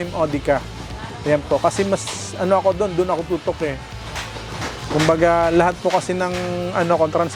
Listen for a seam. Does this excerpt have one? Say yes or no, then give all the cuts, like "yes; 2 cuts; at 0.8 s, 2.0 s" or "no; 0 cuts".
no; 0 cuts